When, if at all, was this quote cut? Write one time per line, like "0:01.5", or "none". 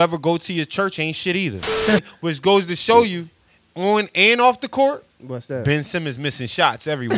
0:02.0